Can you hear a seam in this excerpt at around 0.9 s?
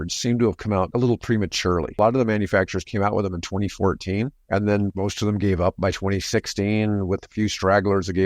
yes; 2 cuts; at 0.9 s, 2.0 s

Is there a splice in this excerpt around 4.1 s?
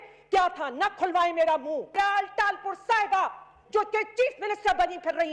no; 1 cut; at 1.9 s

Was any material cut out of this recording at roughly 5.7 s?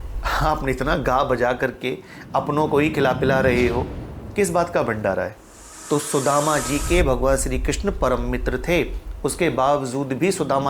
yes; 1 cut; at 5.7 s

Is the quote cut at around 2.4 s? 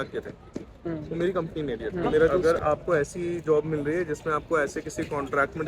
yes; 1 cut; at 2.4 s

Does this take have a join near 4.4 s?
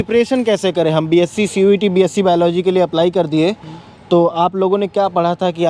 no; 0 cuts

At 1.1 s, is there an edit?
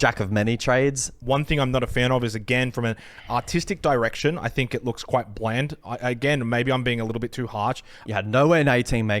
yes; 2 cuts; at 1.1 s, 7.9 s

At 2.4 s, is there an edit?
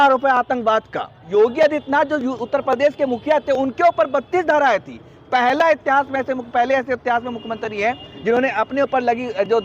no; 1 cut; at 1.2 s

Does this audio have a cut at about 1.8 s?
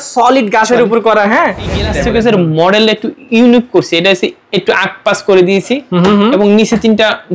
yes; 1 cut; at 1.8 s

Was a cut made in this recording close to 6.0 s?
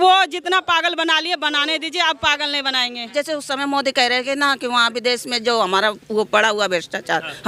no; 1 cut; at 3.0 s

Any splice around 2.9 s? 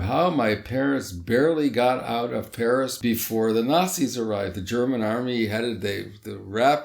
yes; 1 cut; at 2.9 s

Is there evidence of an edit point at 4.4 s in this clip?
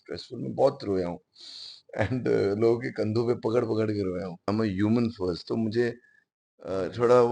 yes; 1 cut; at 4.4 s

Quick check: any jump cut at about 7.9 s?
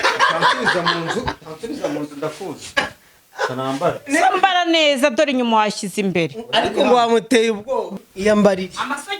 yes; 1 cut; at 7.9 s

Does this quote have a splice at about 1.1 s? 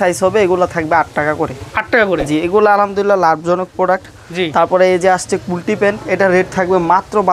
no; 0 cuts

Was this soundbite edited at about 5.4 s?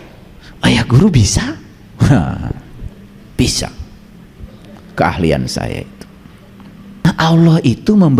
no; 1 cut; at 7.0 s

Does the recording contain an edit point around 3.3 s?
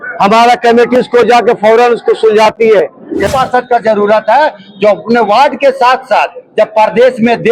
yes; 1 cut; at 3.3 s

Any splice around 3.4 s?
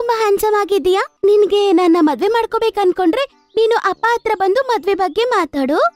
no; 1 cut; at 1.1 s

